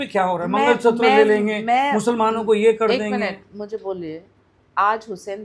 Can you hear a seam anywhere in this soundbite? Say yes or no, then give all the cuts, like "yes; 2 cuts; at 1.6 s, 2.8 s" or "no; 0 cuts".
no; 0 cuts